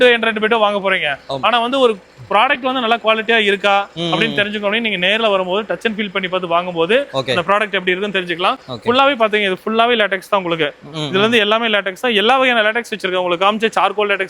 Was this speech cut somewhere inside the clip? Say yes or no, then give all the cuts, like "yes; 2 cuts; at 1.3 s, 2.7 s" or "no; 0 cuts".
no; 0 cuts